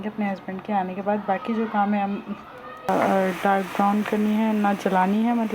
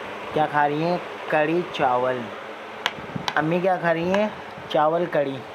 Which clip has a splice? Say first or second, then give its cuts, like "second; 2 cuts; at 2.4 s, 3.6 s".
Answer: first; 1 cut; at 2.9 s